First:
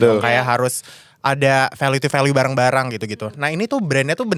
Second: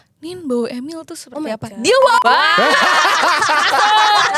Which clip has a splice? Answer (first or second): second